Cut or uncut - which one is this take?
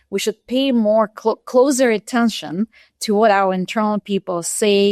uncut